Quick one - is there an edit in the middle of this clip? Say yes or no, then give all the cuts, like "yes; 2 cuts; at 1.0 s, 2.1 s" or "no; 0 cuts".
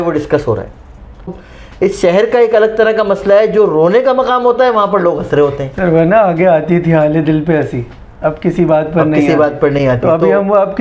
yes; 1 cut; at 1.4 s